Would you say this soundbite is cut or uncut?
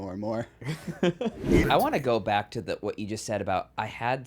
cut